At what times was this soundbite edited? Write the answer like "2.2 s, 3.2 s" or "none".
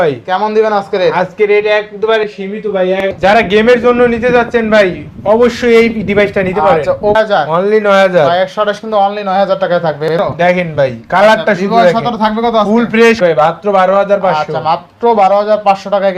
3.1 s, 7.2 s, 10.2 s, 13.2 s

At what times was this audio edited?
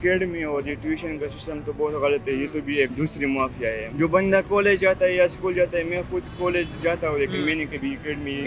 2.9 s, 3.8 s

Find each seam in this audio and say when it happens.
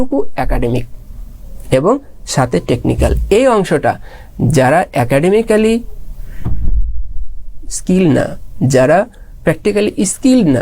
none

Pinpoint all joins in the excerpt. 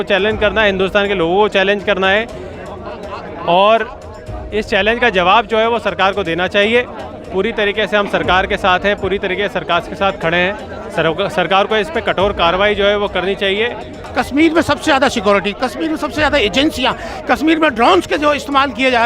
14.0 s

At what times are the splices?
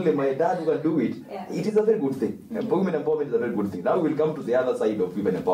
none

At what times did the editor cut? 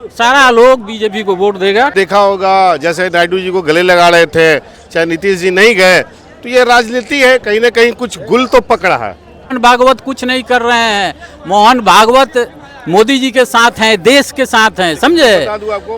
1.9 s, 9.6 s

